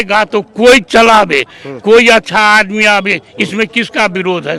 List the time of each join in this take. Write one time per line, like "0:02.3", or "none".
none